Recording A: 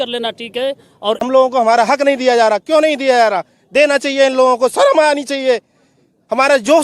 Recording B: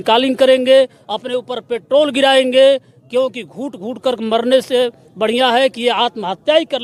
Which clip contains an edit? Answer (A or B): A